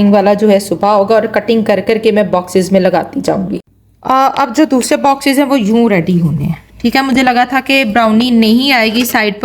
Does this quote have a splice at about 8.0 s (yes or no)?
no